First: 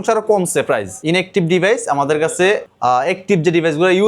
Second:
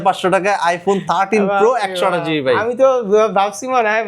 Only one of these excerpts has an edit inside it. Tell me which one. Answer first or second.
first